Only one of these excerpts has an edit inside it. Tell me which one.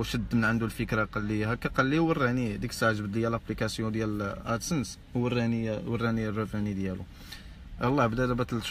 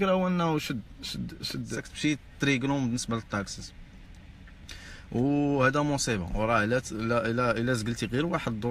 second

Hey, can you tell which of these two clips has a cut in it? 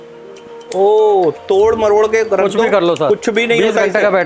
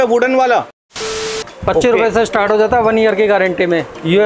second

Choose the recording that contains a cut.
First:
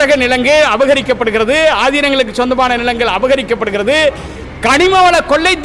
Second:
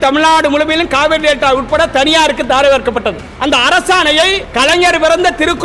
second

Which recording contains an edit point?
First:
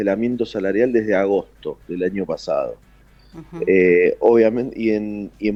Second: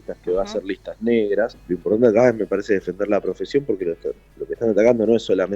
second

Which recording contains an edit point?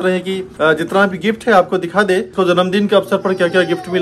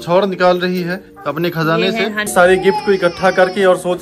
second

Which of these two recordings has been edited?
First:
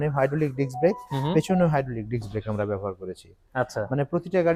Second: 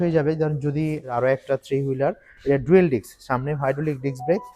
second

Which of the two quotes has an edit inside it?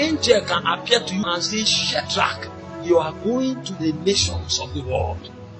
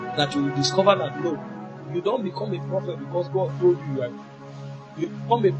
first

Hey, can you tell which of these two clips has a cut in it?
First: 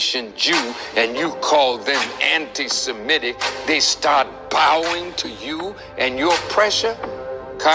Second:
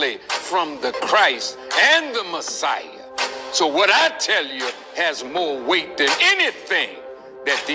first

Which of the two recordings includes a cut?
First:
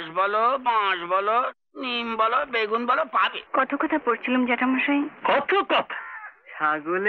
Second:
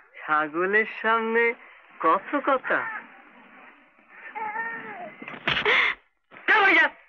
first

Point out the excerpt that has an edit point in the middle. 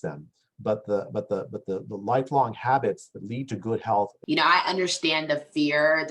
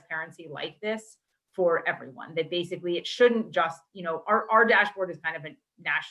first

